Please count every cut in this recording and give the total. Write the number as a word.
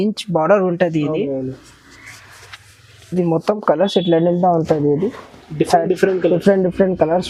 zero